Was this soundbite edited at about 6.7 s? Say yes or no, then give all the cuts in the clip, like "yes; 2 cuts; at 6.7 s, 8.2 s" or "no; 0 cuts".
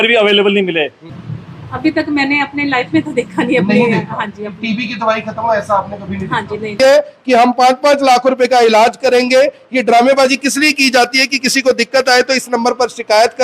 yes; 2 cuts; at 1.0 s, 6.7 s